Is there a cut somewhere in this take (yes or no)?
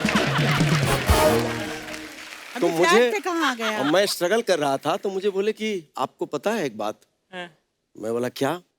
no